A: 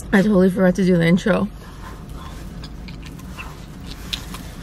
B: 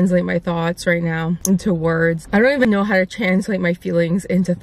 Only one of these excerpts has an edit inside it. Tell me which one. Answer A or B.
B